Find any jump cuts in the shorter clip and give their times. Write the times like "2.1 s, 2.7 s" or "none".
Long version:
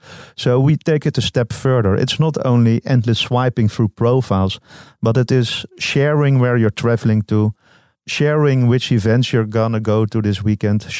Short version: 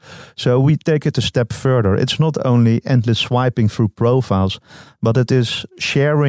none